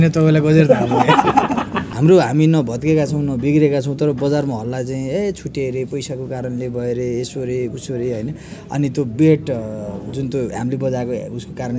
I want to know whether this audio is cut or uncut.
cut